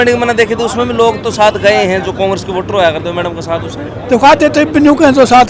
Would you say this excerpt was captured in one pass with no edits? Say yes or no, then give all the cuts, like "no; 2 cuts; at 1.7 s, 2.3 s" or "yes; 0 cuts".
yes; 0 cuts